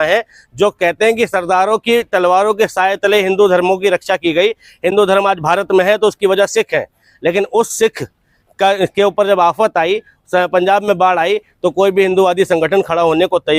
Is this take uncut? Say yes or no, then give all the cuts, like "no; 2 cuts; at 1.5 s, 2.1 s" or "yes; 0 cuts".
yes; 0 cuts